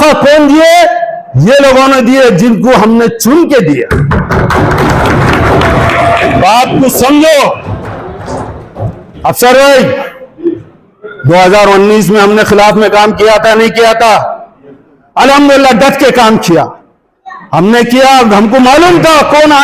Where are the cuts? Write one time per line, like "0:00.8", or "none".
none